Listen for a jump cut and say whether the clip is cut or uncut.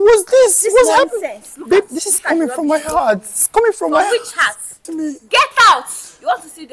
cut